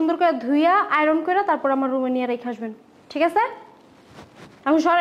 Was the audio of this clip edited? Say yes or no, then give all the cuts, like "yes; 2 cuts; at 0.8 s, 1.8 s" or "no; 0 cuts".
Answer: no; 0 cuts